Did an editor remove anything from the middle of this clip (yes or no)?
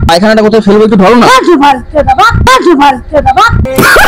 no